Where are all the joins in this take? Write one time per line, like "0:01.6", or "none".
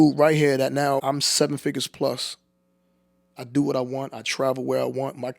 0:01.0